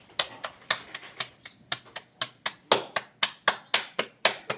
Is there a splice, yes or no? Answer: no